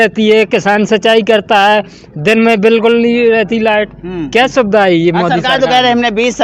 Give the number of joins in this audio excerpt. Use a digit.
0